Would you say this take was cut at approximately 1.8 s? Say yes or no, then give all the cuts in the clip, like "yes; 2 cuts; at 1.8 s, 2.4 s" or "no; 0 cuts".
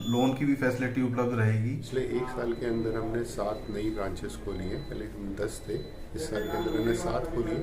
yes; 1 cut; at 1.8 s